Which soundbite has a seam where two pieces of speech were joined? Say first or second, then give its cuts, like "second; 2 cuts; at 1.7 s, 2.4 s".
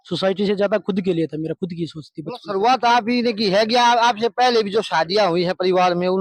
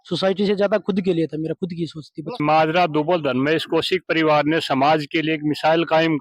second; 1 cut; at 2.4 s